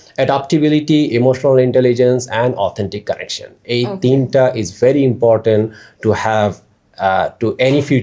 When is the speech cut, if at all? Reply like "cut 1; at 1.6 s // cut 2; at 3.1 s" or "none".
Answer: none